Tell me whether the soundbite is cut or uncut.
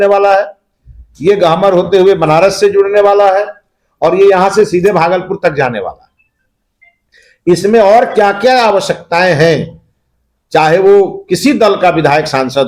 uncut